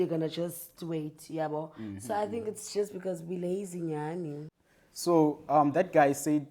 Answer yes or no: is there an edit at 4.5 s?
yes